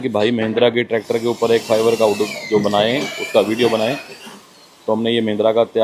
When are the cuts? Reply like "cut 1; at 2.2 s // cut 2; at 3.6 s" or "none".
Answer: none